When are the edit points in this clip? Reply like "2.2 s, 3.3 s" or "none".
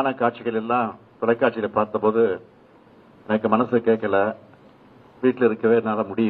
none